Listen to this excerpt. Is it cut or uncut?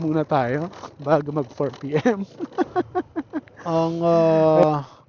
cut